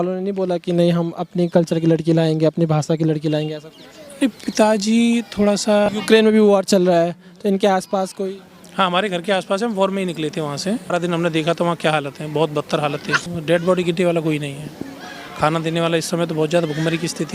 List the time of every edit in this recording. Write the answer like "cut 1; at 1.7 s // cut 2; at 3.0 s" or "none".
cut 1; at 5.9 s // cut 2; at 10.9 s // cut 3; at 13.2 s